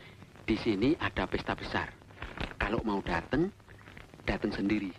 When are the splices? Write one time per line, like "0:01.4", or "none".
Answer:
none